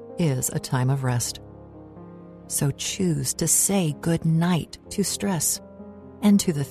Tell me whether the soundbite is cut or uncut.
uncut